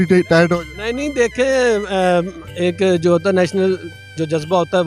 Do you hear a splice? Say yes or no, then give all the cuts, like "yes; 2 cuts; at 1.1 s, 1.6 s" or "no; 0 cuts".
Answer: no; 0 cuts